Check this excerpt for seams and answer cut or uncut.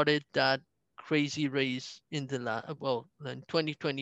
uncut